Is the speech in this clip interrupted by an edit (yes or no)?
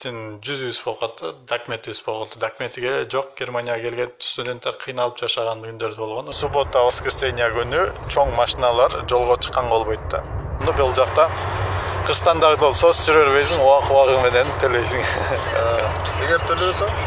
yes